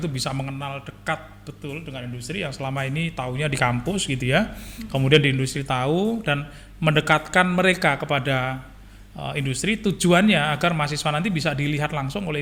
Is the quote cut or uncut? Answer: uncut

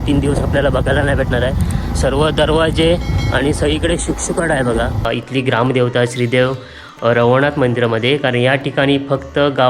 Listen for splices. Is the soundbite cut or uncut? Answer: cut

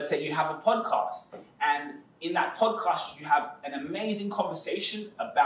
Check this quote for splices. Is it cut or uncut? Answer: uncut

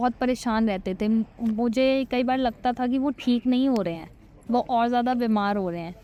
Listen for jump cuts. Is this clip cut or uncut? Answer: uncut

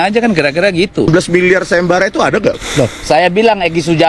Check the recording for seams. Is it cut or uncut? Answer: cut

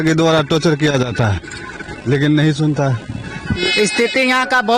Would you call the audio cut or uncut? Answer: cut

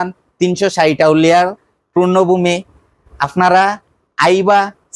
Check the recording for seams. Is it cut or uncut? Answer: uncut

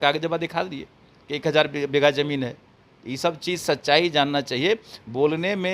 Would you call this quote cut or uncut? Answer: uncut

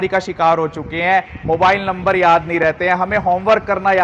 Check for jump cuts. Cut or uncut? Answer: uncut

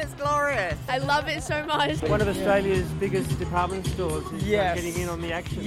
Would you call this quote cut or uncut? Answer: cut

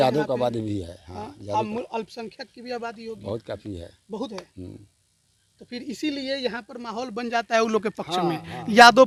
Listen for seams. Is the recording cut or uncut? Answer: uncut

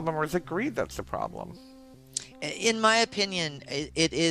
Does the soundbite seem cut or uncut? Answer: uncut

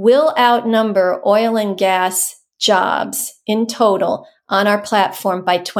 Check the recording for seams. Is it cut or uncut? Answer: uncut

